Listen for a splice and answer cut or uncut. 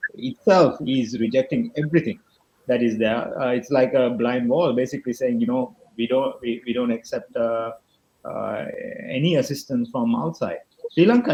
uncut